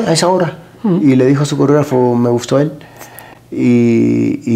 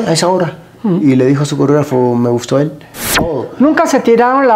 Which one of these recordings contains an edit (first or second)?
second